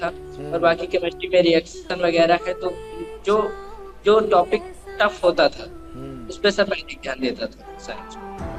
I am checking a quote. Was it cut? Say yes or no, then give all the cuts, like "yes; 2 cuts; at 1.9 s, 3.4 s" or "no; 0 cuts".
no; 0 cuts